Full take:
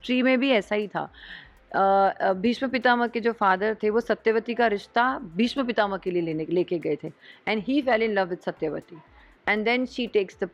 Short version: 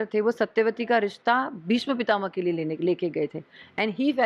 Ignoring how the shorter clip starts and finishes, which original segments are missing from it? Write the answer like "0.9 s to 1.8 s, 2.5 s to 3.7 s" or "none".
none